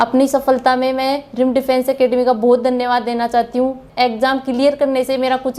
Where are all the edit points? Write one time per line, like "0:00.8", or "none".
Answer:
0:03.8